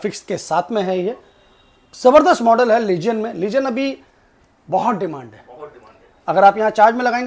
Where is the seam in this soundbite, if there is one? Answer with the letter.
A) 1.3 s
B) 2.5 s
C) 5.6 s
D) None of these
D